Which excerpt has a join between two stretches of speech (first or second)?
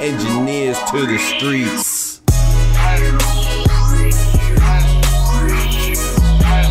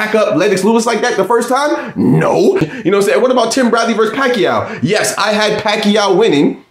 second